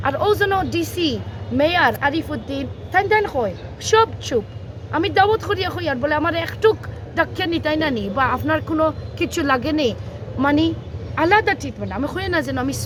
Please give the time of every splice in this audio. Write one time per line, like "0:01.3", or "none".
none